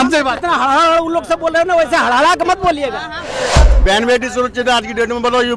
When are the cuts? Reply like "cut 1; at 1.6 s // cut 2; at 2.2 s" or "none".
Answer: cut 1; at 3.5 s